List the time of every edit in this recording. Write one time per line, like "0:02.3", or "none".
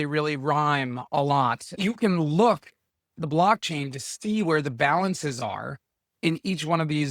0:01.7